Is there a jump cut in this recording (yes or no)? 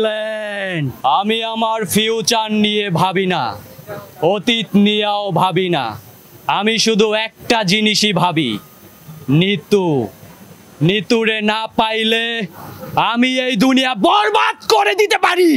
yes